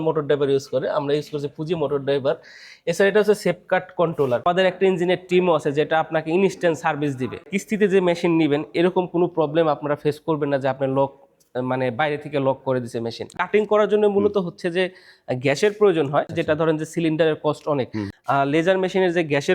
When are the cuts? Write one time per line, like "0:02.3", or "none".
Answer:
0:04.4
0:07.5
0:13.4
0:16.3
0:18.1